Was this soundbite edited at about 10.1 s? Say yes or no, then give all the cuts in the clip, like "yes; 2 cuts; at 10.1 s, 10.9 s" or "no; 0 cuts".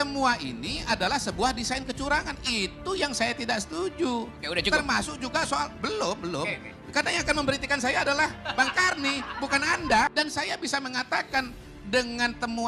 yes; 1 cut; at 10.1 s